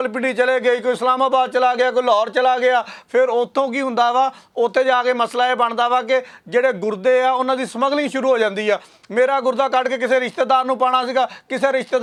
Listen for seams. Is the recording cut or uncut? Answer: uncut